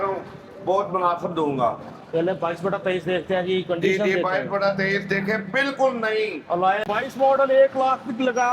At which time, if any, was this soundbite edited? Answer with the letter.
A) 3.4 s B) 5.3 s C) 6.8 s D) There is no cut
C